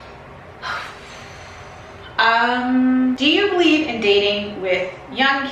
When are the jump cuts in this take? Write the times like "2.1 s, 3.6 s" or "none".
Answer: 3.2 s

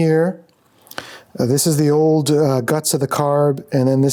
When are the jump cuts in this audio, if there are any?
none

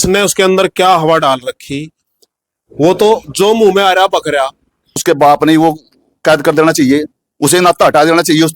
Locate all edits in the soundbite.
5.0 s

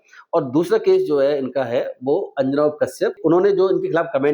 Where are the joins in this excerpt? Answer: 3.2 s

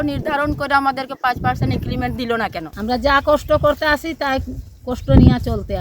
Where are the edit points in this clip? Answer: 2.7 s

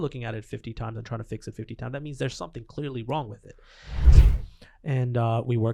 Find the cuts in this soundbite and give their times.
4.1 s

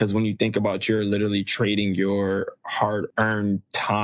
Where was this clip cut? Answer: 3.1 s

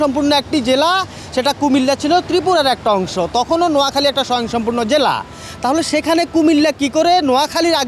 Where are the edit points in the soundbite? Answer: none

